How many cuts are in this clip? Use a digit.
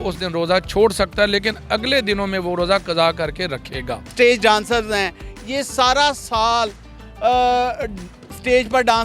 1